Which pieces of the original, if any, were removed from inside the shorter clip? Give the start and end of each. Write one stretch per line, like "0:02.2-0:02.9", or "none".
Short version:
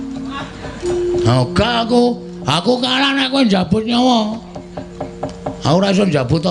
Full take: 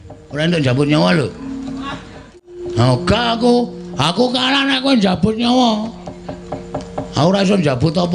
none

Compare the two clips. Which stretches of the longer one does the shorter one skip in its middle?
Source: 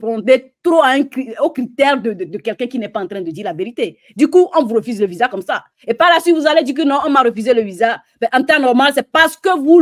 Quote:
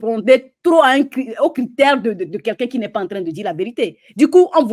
none

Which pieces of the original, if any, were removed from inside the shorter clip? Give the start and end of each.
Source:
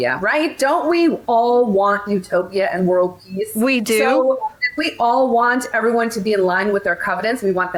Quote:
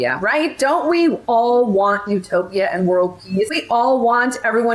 0:03.5-0:04.8

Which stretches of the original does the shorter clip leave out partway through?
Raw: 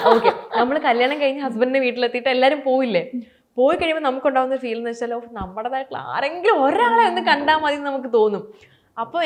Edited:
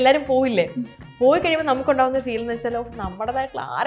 none

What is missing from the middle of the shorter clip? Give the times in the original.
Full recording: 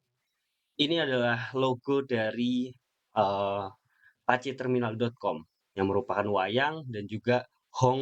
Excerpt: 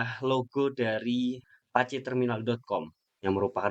0:02.8-0:04.1

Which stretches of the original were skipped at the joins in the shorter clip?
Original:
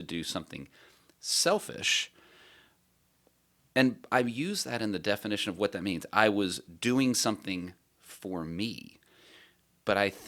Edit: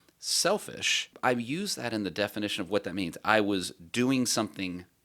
0:02.1-0:04.0

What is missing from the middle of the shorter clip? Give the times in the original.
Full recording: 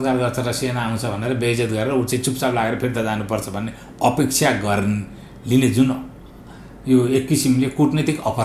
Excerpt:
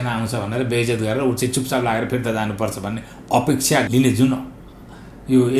0:04.6-0:05.5

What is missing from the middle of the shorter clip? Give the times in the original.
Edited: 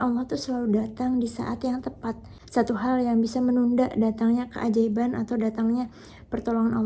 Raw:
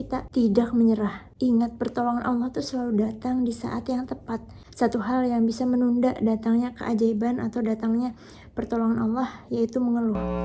none

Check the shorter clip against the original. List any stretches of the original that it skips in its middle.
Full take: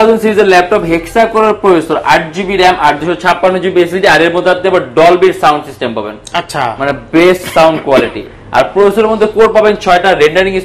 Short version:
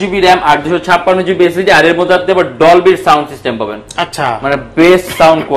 none

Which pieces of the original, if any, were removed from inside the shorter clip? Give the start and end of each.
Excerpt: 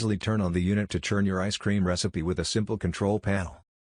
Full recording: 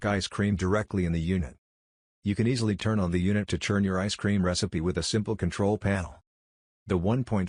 none

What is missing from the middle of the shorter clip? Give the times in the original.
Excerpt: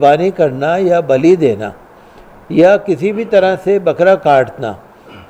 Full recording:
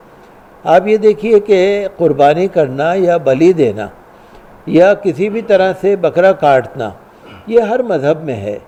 none

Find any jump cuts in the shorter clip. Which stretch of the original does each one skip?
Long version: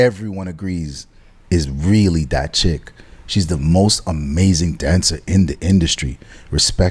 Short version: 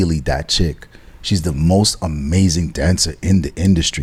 none

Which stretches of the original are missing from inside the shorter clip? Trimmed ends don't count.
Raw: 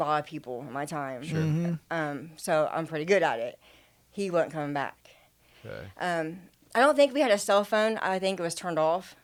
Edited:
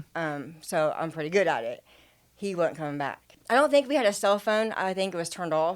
0:05.0-0:06.5

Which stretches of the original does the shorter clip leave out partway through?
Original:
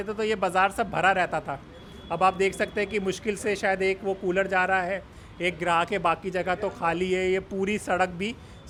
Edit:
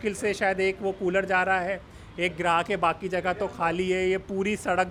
none

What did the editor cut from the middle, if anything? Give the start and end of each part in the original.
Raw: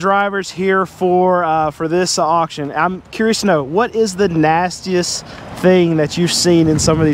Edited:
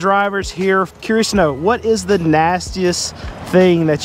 0:00.9-0:03.0

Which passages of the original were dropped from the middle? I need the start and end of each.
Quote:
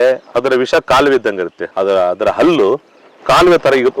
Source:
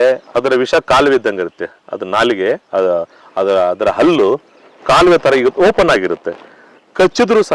0:01.6-0:03.2

